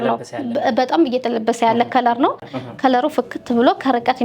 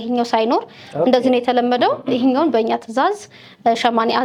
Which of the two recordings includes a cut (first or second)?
first